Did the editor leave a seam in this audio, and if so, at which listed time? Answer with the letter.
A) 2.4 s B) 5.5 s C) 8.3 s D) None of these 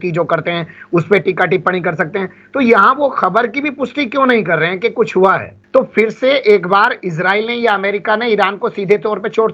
B